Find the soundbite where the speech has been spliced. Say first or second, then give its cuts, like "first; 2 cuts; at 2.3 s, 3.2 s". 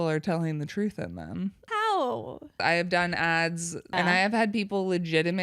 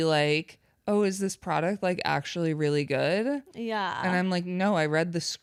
first; 3 cuts; at 1.7 s, 2.6 s, 3.9 s